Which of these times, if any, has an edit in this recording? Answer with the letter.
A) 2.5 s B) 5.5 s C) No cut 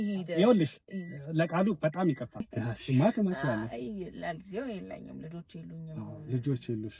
A